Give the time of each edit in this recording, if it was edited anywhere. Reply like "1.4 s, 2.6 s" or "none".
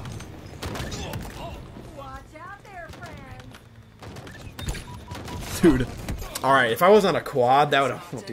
none